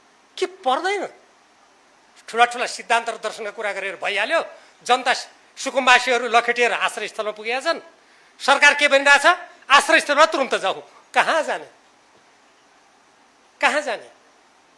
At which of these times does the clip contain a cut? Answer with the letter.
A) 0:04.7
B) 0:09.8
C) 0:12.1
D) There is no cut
D